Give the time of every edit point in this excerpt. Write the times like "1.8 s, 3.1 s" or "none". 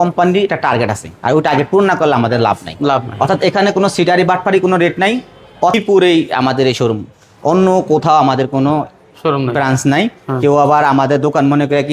5.7 s